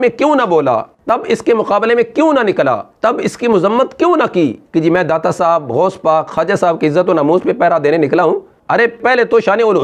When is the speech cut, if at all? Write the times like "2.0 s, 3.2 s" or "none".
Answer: 0.9 s, 4.6 s